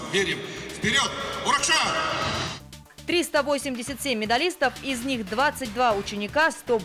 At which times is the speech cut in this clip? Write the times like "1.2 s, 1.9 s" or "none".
2.5 s

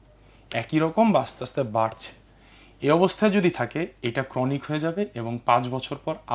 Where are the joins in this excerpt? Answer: none

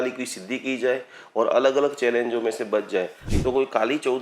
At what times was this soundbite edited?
3.2 s

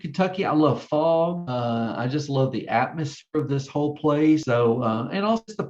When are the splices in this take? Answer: 4.4 s

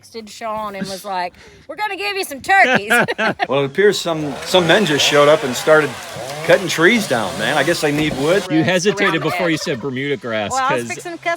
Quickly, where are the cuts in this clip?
3.4 s, 8.5 s

